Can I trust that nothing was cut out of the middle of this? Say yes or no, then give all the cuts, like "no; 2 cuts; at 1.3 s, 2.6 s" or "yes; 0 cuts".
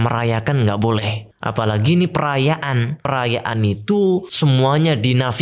no; 3 cuts; at 1.2 s, 3.0 s, 4.3 s